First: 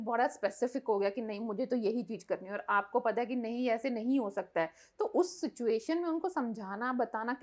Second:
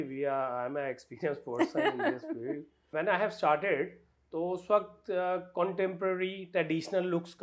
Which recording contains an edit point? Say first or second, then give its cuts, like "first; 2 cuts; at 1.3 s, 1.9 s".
second; 1 cut; at 2.9 s